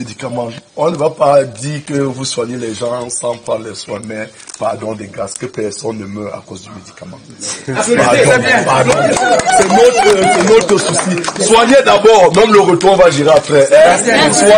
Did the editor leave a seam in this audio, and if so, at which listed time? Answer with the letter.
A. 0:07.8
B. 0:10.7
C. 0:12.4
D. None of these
D